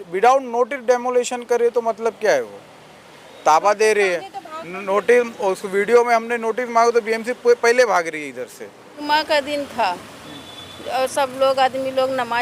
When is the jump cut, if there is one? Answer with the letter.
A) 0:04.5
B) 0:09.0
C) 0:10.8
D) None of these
B